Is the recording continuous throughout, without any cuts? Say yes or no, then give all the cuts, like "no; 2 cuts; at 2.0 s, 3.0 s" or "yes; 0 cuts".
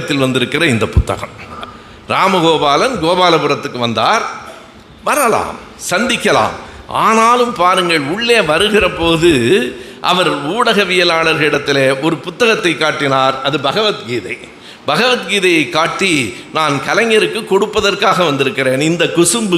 no; 1 cut; at 1.5 s